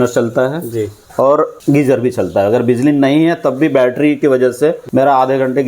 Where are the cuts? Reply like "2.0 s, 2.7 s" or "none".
1.0 s, 1.6 s, 4.5 s